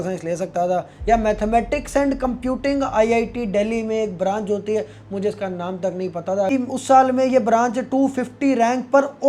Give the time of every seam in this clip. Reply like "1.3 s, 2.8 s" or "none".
6.5 s